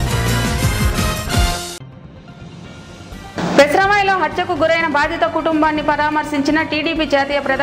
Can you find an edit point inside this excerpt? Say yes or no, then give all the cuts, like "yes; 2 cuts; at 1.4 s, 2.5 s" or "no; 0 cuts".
yes; 1 cut; at 3.2 s